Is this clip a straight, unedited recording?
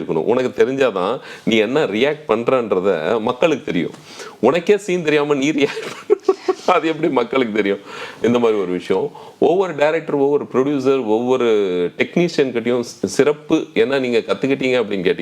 yes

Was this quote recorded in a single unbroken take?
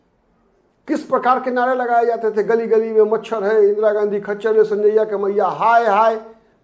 yes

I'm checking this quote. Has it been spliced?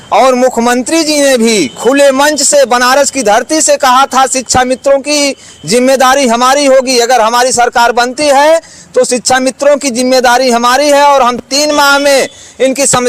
no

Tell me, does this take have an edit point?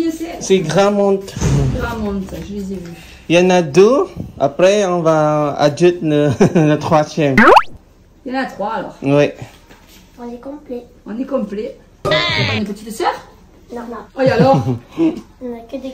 no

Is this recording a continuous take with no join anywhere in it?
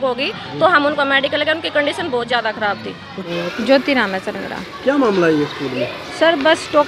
yes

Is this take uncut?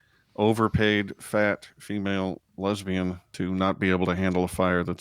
no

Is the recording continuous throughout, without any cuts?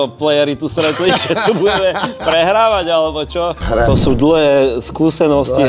no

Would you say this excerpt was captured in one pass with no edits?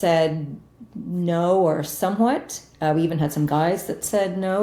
yes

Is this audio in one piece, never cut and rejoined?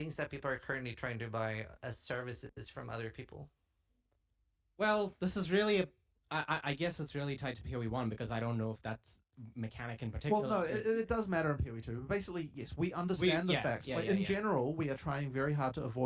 yes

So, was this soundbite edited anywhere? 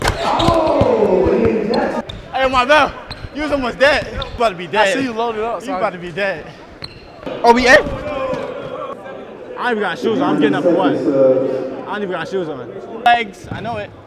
yes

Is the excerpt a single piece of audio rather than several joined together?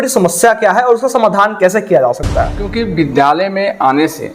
no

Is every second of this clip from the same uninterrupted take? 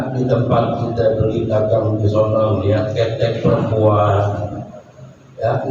yes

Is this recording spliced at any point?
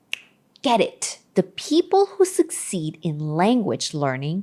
yes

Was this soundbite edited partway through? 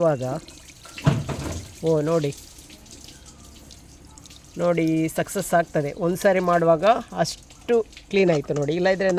no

